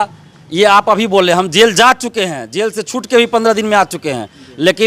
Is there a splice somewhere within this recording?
no; 0 cuts

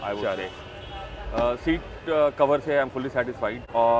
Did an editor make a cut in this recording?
no; 0 cuts

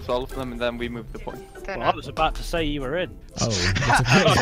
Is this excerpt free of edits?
no; 2 cuts; at 1.7 s, 3.2 s

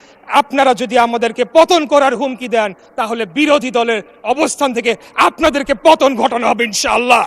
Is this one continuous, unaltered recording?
yes; 0 cuts

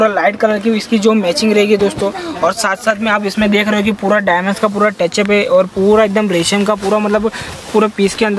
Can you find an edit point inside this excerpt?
no; 0 cuts

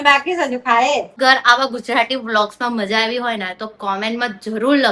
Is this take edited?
yes; 1 cut; at 1.2 s

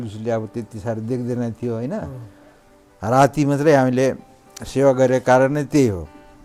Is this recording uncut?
yes; 0 cuts

